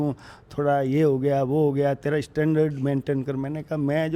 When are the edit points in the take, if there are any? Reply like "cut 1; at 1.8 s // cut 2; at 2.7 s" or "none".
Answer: none